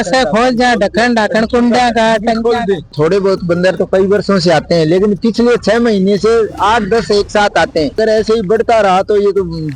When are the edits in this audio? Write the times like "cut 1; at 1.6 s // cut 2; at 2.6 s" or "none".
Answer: cut 1; at 2.9 s // cut 2; at 7.9 s